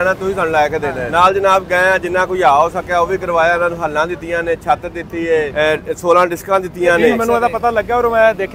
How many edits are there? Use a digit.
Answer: 3